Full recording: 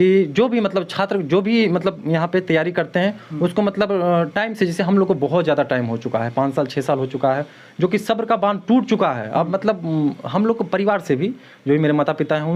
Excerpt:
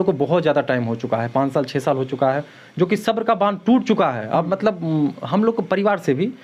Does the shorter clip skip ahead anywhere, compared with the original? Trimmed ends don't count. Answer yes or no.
no